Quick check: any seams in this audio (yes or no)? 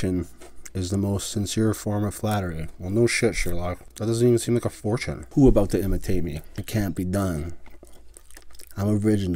yes